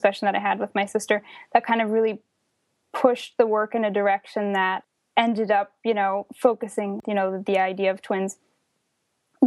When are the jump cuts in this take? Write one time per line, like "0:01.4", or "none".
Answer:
0:04.8
0:07.0